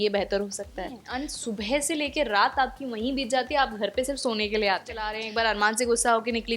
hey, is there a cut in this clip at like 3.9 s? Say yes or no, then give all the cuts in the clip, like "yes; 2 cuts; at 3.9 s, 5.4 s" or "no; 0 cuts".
no; 2 cuts; at 1.0 s, 5.2 s